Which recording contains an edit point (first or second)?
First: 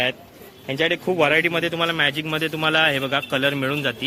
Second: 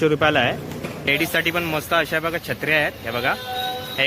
second